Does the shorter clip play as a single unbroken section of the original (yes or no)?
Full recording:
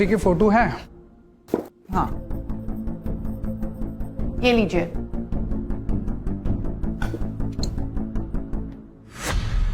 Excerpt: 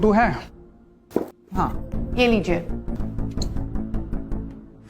no